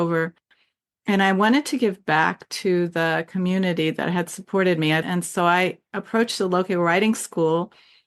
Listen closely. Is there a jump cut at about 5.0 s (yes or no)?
yes